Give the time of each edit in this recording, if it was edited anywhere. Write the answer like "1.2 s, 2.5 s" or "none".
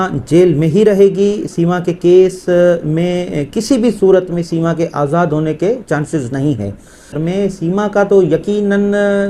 7.2 s